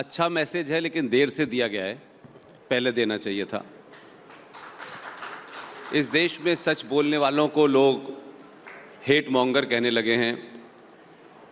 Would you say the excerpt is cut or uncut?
uncut